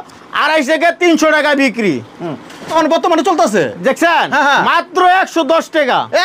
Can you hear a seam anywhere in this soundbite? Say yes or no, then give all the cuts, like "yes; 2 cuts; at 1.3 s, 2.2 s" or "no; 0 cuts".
yes; 1 cut; at 2.7 s